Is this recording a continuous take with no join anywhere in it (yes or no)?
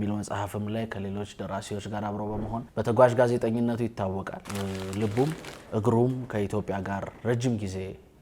no